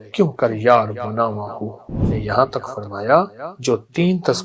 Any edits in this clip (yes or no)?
yes